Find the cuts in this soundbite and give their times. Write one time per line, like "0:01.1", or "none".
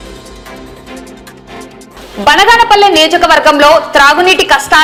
none